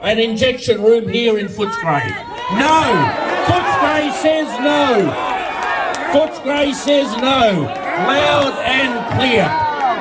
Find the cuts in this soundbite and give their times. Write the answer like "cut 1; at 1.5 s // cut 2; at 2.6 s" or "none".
none